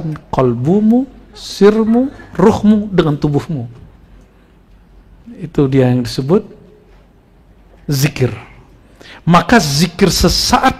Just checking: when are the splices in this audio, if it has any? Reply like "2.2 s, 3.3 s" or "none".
none